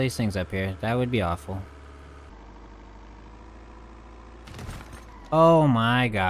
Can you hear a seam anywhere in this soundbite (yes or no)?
yes